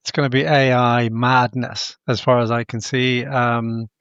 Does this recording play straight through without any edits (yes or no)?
yes